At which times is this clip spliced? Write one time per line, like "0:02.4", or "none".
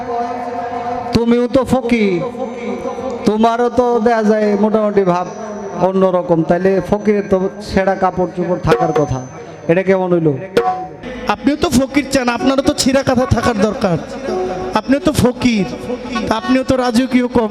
0:11.1